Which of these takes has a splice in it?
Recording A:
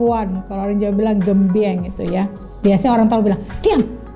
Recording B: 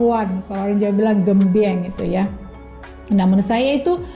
A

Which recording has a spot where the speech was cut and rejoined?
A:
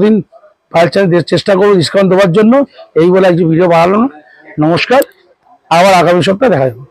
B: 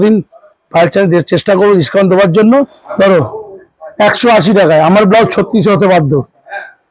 B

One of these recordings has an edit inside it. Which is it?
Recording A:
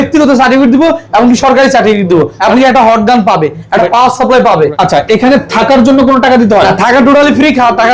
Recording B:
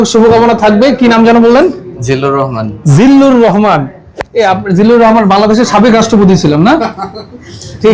A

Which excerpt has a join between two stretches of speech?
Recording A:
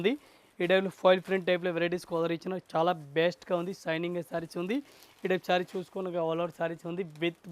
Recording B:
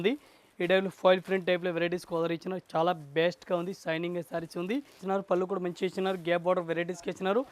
B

